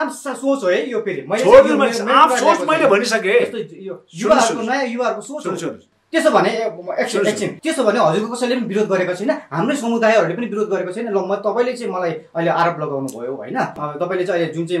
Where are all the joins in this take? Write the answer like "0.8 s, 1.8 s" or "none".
7.6 s, 13.8 s